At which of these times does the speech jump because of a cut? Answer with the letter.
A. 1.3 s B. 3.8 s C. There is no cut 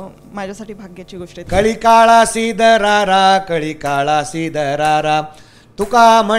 A